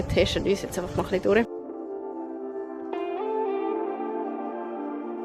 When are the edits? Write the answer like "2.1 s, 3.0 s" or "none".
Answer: none